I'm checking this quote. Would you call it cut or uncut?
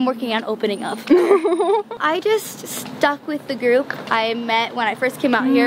cut